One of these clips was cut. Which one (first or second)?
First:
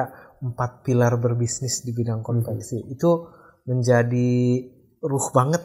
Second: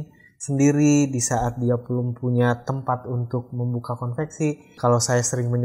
second